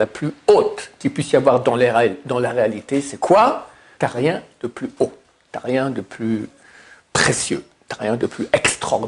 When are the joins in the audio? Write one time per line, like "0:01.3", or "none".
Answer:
0:03.8